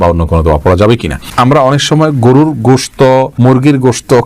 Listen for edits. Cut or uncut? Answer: cut